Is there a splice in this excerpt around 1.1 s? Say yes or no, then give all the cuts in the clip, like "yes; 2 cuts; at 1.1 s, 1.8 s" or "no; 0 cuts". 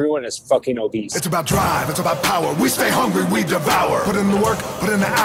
yes; 1 cut; at 1.1 s